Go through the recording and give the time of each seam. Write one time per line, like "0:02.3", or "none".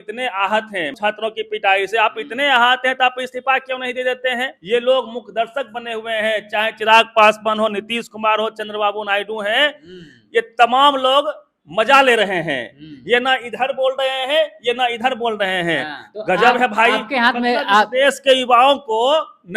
0:00.9
0:04.5
0:16.0